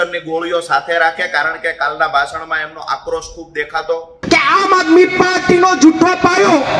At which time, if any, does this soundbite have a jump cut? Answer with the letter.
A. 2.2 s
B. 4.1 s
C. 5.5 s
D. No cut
B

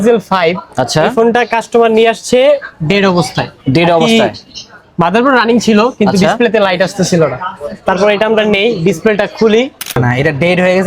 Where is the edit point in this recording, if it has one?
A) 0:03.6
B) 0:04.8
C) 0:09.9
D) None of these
C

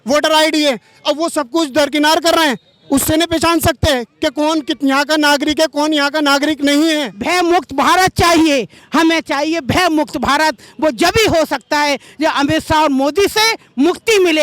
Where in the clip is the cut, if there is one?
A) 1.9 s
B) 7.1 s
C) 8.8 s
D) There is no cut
B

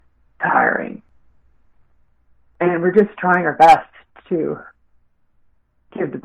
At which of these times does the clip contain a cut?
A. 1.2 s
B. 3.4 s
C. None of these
A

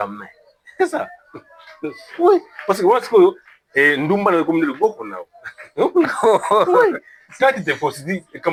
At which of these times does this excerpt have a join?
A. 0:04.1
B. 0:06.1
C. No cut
C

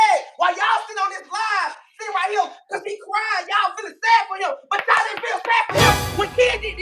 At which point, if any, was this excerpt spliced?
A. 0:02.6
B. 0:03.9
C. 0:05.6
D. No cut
D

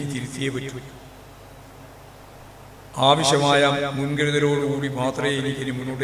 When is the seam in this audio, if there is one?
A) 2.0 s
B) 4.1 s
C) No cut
C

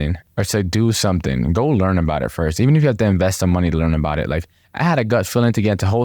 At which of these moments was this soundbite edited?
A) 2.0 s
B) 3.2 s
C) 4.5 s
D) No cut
D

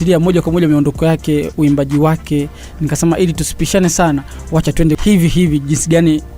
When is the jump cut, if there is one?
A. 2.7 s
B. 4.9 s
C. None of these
B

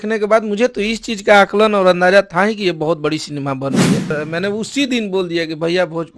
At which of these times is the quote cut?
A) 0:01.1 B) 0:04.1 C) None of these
B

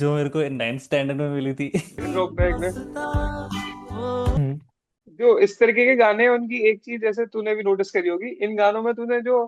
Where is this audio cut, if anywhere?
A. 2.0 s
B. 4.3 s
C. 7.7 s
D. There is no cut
A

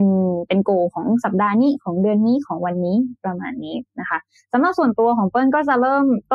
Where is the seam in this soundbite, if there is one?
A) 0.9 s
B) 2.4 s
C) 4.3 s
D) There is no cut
D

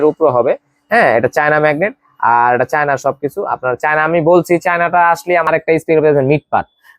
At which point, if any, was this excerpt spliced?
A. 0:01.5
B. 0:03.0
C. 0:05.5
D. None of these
C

